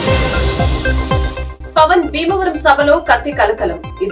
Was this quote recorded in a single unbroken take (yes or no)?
no